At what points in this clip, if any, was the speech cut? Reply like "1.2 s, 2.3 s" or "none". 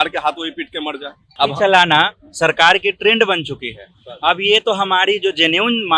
1.4 s